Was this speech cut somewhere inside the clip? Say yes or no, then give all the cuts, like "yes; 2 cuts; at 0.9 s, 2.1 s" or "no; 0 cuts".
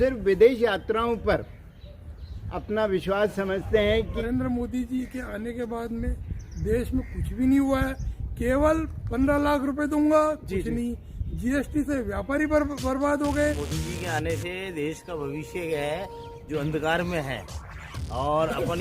yes; 2 cuts; at 4.2 s, 13.7 s